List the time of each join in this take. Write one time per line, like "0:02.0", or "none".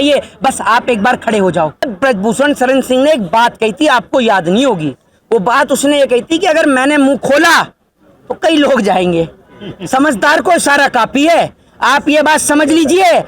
0:01.9